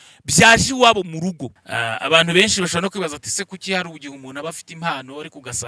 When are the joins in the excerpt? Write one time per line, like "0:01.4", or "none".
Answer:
0:01.4